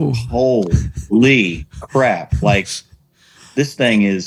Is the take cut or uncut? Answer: uncut